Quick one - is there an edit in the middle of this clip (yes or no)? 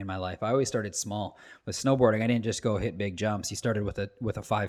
no